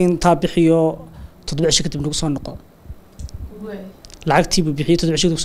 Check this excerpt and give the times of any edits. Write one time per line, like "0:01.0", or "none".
none